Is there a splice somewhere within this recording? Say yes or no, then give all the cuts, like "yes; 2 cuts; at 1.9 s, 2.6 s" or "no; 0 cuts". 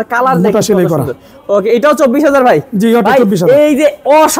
no; 0 cuts